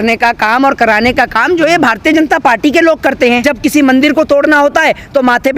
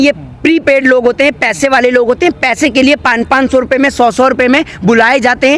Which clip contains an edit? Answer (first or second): first